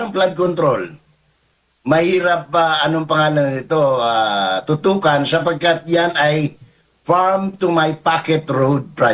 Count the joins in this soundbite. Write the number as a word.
zero